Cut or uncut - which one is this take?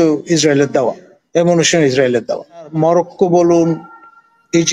cut